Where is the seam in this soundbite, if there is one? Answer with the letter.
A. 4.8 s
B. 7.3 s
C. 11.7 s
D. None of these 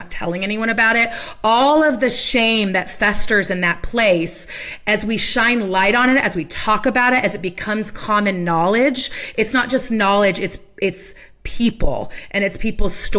D